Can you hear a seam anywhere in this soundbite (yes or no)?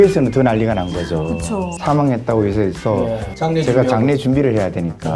yes